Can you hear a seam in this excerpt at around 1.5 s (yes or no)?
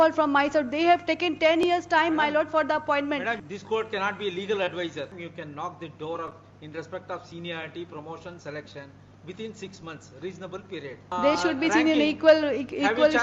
no